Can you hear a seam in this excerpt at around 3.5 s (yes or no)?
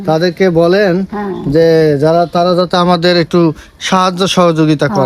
no